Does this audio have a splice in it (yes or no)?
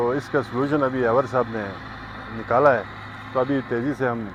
no